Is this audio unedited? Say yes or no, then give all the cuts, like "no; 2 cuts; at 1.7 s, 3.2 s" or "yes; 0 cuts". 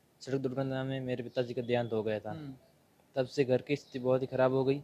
yes; 0 cuts